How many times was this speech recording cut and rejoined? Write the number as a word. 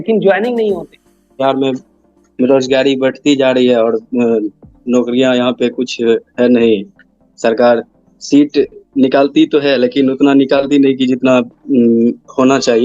one